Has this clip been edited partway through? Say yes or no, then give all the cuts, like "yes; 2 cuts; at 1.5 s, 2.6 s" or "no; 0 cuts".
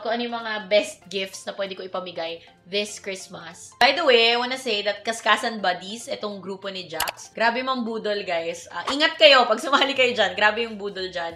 no; 0 cuts